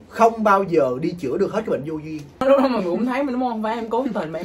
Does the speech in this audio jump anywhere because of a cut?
yes; 1 cut; at 2.3 s

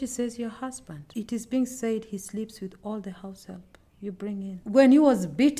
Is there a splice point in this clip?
yes; 2 cuts; at 1.0 s, 4.5 s

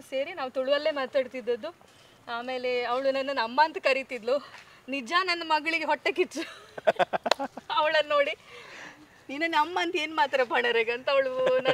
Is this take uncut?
yes; 0 cuts

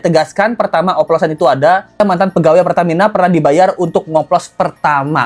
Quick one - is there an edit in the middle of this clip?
no; 0 cuts

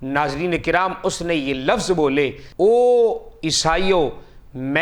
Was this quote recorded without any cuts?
no; 1 cut; at 2.4 s

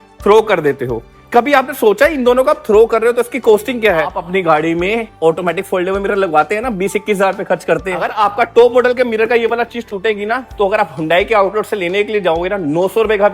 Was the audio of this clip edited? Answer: yes; 2 cuts; at 4.2 s, 8.1 s

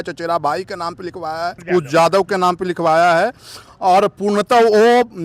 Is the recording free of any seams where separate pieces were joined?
yes; 0 cuts

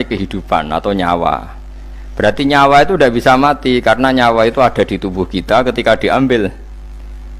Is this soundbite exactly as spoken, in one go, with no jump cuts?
yes; 0 cuts

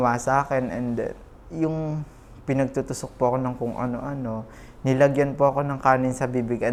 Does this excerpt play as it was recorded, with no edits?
yes; 0 cuts

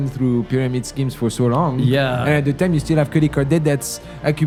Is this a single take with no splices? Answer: yes; 0 cuts

